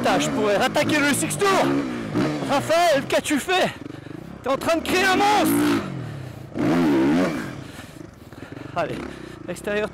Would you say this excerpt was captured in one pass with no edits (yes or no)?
yes